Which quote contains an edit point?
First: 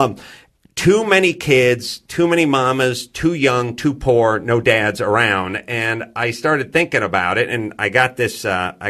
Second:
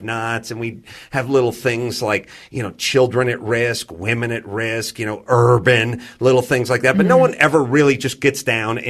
first; 1 cut; at 7.5 s

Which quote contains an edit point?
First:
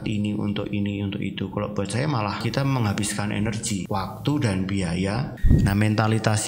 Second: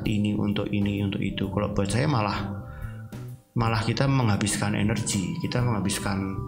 first; 3 cuts; at 2.4 s, 3.8 s, 5.4 s

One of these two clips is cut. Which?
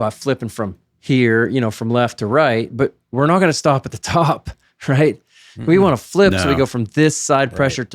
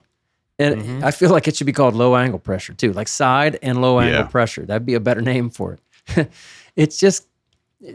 first; 1 cut; at 2.7 s

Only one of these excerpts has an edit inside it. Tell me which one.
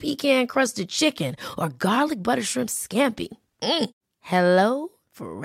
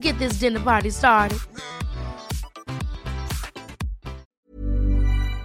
second; 1 cut; at 4.3 s

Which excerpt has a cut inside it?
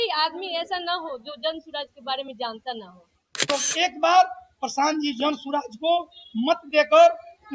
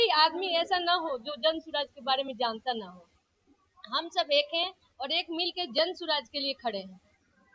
first; 1 cut; at 3.4 s

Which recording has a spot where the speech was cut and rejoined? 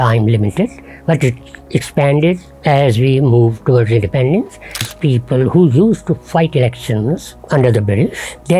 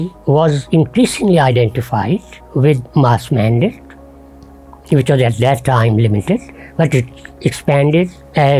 first; 1 cut; at 4.8 s

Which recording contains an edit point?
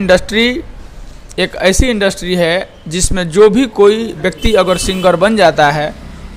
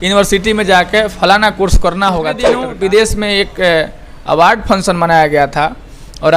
second; 1 cut; at 2.6 s

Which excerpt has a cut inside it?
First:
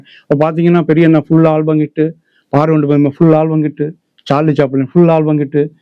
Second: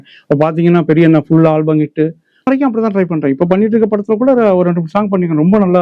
second; 1 cut; at 2.5 s

